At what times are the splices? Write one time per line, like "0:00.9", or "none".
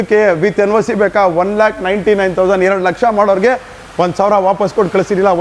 none